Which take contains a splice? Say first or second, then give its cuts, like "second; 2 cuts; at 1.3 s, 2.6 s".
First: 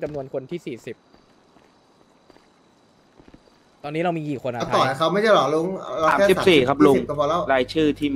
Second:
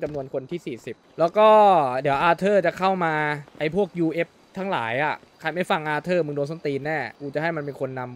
second; 4 cuts; at 1.0 s, 3.5 s, 5.3 s, 7.2 s